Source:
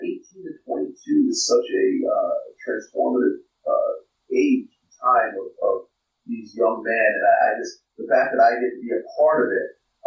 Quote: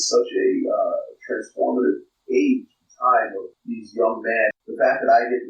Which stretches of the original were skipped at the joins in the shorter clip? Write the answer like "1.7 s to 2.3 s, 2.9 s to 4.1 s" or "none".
3.5 s to 4.1 s, 5.4 s to 6.0 s, 7.2 s to 7.9 s